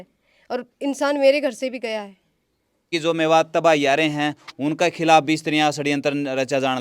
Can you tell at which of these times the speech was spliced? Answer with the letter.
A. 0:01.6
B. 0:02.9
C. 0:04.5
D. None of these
B